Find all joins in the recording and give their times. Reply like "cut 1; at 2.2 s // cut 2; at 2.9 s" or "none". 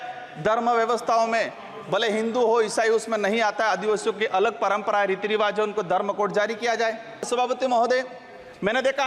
cut 1; at 7.3 s